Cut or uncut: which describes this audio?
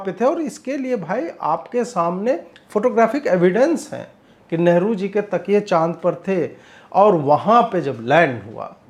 uncut